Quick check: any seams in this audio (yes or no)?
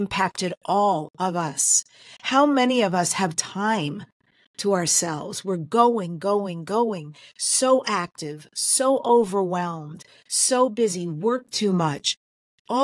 no